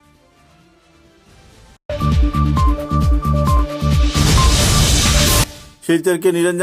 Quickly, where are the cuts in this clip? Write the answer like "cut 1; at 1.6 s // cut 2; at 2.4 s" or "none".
none